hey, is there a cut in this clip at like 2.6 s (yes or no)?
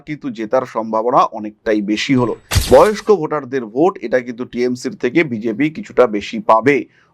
yes